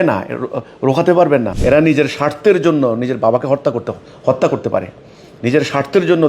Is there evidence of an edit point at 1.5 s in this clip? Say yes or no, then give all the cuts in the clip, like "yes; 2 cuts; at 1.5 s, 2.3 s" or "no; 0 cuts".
yes; 1 cut; at 1.5 s